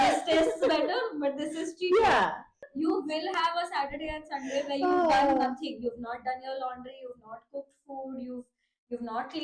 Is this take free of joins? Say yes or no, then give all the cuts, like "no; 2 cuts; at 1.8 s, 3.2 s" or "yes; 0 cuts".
no; 1 cut; at 2.7 s